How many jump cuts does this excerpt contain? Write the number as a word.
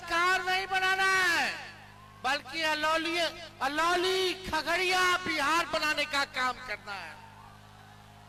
zero